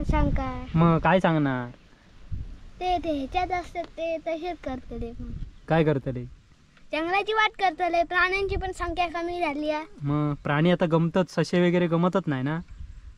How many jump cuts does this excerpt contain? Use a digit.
0